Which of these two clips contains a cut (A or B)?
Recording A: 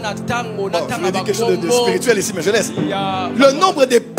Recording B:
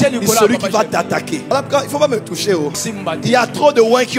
B